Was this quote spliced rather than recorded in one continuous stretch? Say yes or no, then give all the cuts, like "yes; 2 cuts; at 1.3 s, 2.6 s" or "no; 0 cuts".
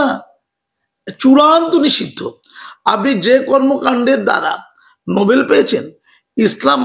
no; 0 cuts